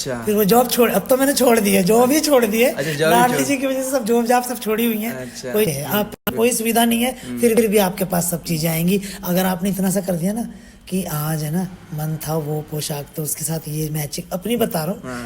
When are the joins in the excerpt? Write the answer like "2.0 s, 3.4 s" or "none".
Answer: 5.7 s

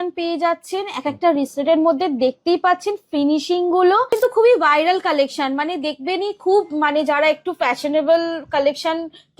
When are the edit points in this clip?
4.2 s

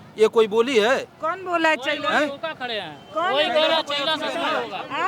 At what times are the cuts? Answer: none

